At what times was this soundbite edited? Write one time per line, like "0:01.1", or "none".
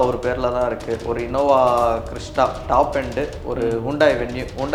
none